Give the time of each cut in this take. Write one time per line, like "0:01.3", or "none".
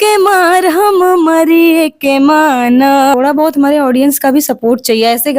0:03.1